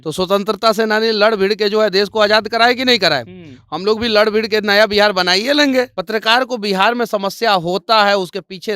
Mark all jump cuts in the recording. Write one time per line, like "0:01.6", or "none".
0:06.0